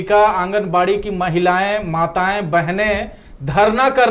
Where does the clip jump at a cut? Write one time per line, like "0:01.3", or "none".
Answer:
none